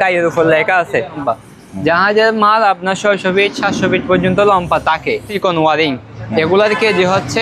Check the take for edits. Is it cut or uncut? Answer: cut